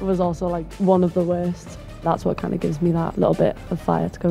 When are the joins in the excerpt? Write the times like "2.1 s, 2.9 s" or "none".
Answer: 1.9 s, 3.1 s